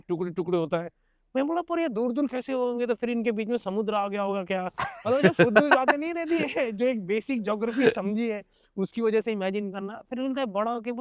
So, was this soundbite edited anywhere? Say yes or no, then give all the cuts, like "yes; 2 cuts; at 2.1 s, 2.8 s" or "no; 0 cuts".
no; 0 cuts